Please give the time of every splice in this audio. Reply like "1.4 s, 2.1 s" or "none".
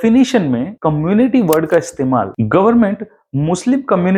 none